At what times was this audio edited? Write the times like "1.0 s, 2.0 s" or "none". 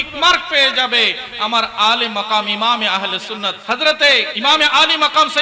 3.6 s, 4.3 s